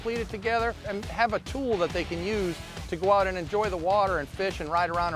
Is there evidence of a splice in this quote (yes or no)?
yes